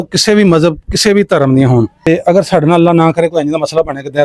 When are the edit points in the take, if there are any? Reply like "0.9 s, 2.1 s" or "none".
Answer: 2.0 s